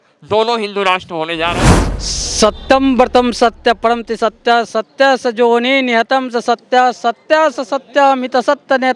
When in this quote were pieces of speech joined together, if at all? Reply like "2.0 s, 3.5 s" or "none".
1.6 s